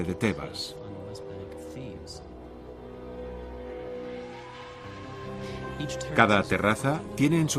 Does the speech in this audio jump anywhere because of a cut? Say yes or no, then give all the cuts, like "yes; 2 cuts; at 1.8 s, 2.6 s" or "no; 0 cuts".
yes; 1 cut; at 6.1 s